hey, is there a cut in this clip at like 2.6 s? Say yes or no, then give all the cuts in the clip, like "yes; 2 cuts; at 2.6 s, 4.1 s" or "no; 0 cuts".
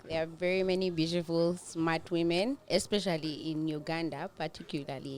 yes; 1 cut; at 2.6 s